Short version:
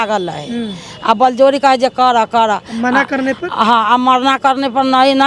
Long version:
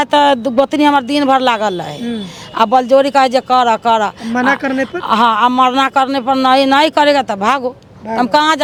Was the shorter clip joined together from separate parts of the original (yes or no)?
no